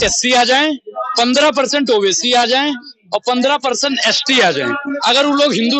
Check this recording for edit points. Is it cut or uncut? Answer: uncut